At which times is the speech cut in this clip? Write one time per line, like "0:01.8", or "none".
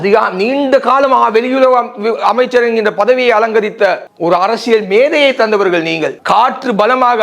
0:06.1